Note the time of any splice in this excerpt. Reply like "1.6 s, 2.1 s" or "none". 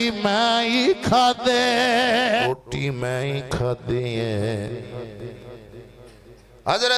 2.4 s